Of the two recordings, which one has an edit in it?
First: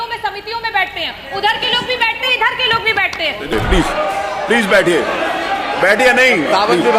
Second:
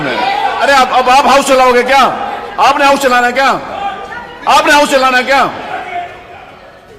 first; 1 cut; at 3.5 s

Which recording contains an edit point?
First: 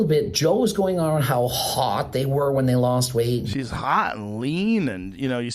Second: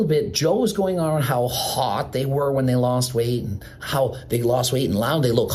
first; 1 cut; at 3.6 s

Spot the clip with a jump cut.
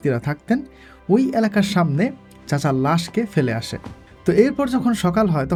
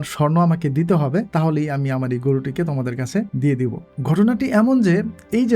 second; 2 cuts; at 1.3 s, 3.5 s

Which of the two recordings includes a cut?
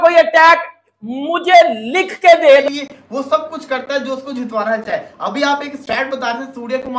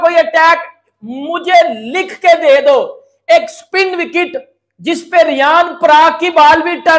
first; 1 cut; at 2.6 s

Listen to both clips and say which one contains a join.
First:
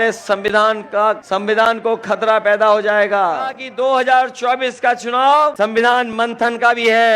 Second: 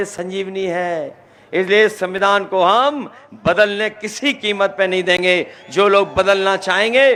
first; 3 cuts; at 1.2 s, 3.6 s, 5.5 s

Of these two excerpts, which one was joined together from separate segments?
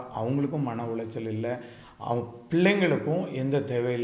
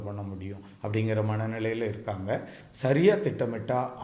second; 1 cut; at 2.6 s

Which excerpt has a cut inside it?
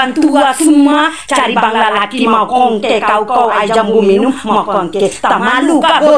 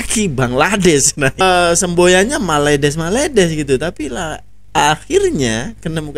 second; 1 cut; at 1.4 s

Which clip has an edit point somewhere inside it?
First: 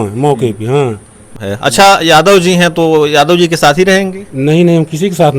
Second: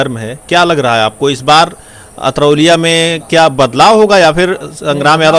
first; 1 cut; at 1.4 s

